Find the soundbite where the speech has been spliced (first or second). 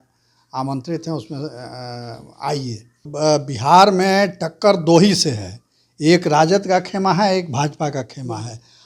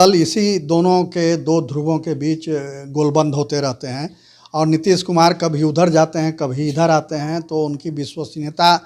first